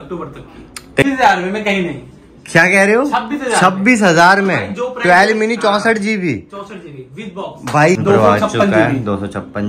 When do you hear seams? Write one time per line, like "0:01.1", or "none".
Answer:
0:01.0
0:08.0